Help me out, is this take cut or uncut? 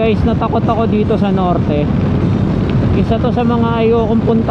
uncut